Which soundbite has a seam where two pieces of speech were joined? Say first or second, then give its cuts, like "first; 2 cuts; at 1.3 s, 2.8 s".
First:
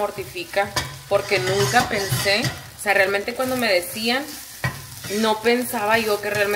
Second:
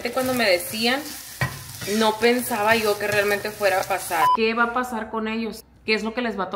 second; 1 cut; at 4.3 s